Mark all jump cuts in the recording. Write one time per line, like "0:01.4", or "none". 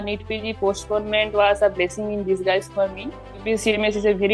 0:03.4

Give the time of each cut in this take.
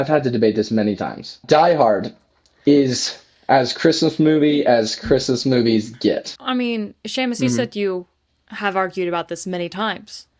0:01.4
0:06.3

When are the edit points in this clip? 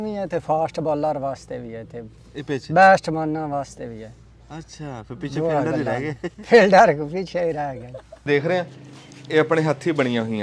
0:08.2

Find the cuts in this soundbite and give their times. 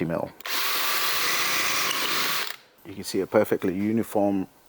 0:02.3

